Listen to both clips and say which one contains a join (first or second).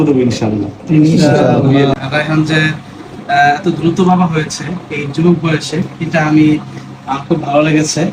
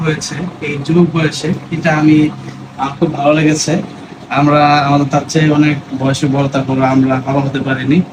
first